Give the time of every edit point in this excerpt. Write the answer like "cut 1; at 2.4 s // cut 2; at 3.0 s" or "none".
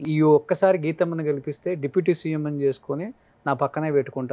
none